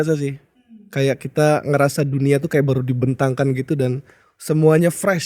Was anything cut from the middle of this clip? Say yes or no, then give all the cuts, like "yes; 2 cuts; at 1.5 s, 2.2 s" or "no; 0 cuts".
no; 0 cuts